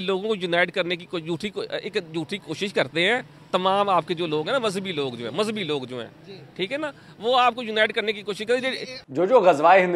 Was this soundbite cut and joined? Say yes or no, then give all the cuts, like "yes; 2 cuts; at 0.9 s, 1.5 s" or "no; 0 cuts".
yes; 1 cut; at 8.9 s